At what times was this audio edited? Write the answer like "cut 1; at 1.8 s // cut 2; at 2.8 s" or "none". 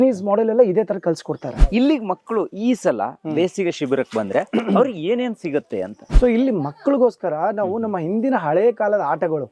cut 1; at 1.7 s // cut 2; at 6.0 s